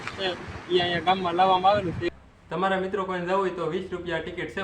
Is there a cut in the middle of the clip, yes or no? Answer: yes